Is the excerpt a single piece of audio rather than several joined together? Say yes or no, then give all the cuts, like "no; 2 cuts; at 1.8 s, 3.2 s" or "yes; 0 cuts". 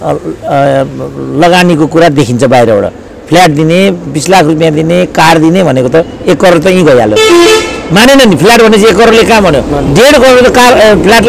yes; 0 cuts